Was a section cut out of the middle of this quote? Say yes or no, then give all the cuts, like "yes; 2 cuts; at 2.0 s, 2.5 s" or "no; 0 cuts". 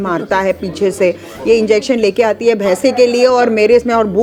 no; 0 cuts